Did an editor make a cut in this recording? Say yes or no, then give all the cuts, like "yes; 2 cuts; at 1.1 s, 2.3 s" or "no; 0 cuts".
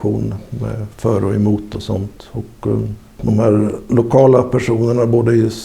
yes; 1 cut; at 3.2 s